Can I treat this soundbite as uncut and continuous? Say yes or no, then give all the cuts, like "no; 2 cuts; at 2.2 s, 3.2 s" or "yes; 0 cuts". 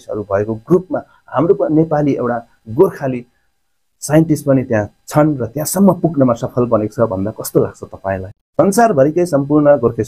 no; 1 cut; at 8.3 s